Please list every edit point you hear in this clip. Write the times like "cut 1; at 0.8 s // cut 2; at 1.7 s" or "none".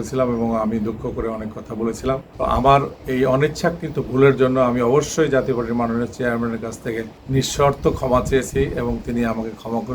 cut 1; at 2.3 s // cut 2; at 7.2 s